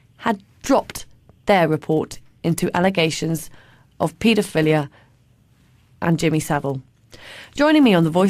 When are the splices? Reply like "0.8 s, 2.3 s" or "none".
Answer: 6.4 s